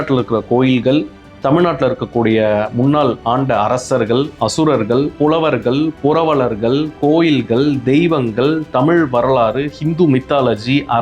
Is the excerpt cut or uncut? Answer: cut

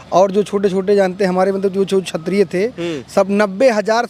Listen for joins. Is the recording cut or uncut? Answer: uncut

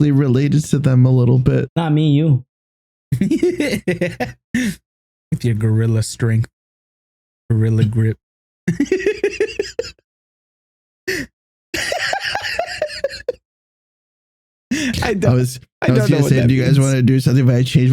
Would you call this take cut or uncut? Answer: cut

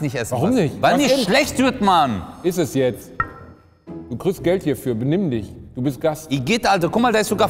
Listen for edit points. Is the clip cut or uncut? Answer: uncut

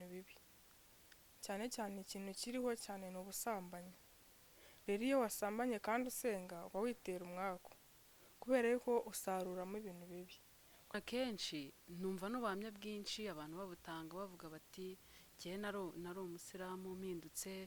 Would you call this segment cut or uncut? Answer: cut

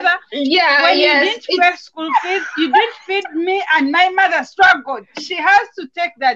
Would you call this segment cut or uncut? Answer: uncut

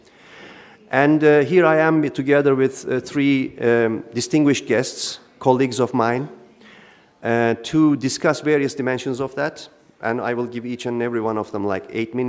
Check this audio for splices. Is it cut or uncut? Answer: uncut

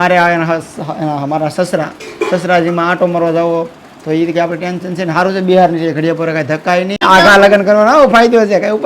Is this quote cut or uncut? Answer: cut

